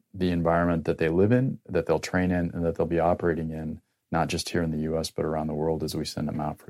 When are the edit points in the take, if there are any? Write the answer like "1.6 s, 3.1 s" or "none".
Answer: none